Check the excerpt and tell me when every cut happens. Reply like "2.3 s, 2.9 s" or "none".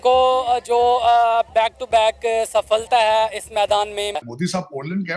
4.3 s